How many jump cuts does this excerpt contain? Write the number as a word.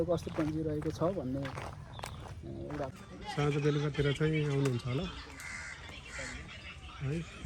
one